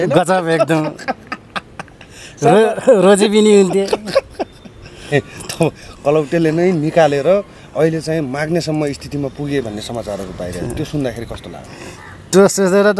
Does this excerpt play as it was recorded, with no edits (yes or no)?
no